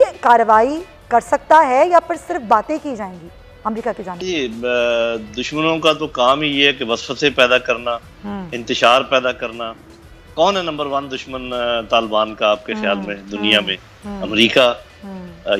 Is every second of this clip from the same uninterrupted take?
yes; 0 cuts

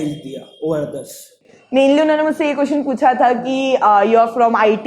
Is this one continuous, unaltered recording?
no; 1 cut; at 1.5 s

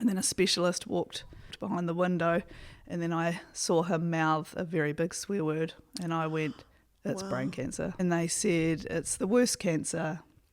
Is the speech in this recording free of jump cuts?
no; 2 cuts; at 1.6 s, 8.0 s

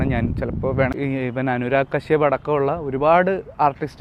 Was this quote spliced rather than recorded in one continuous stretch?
yes; 1 cut; at 0.9 s

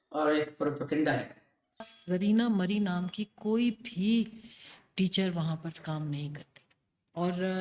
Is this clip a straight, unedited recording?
no; 1 cut; at 1.9 s

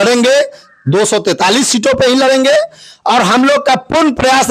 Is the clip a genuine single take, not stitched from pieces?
yes; 0 cuts

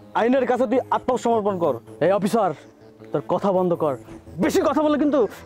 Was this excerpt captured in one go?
no; 1 cut; at 1.9 s

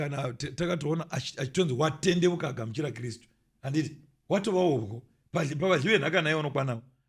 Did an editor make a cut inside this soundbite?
no; 0 cuts

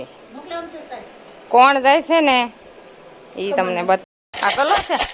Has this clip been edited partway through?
yes; 1 cut; at 4.0 s

